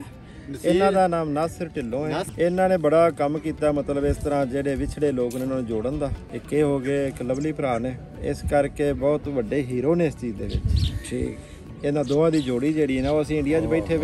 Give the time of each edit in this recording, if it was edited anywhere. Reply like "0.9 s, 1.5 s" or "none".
2.3 s, 6.3 s, 8.2 s, 11.6 s